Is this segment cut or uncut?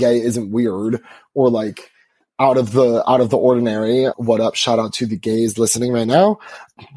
cut